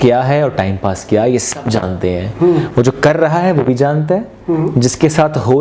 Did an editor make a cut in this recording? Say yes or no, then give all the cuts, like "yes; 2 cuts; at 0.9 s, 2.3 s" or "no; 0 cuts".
no; 0 cuts